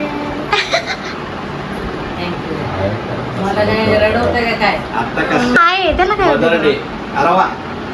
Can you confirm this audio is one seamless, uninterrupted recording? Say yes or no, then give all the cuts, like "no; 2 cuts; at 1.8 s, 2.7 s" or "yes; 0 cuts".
no; 1 cut; at 5.6 s